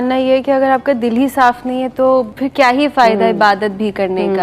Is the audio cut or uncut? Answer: cut